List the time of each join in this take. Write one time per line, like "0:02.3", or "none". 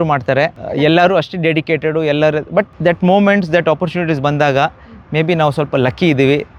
none